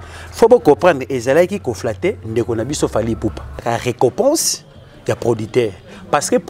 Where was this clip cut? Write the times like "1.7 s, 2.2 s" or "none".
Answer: 3.6 s

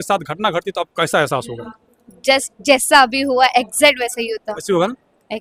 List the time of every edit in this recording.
none

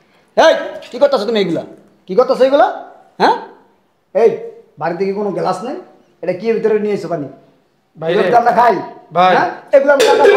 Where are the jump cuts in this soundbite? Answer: none

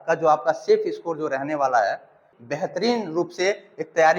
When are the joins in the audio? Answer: 2.3 s

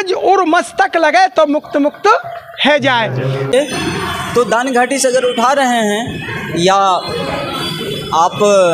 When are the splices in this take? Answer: 3.5 s

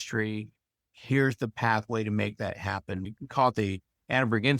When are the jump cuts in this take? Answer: 3.1 s

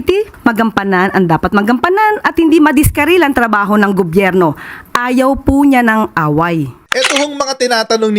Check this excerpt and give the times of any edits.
7.1 s

